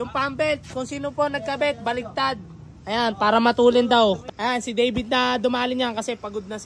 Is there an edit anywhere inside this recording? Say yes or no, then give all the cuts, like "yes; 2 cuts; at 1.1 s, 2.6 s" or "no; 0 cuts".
yes; 1 cut; at 4.2 s